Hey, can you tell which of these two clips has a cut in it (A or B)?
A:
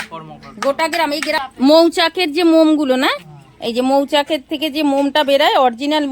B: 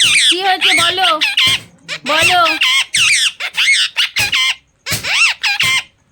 A